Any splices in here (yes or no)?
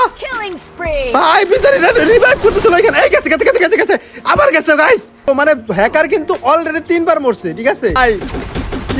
yes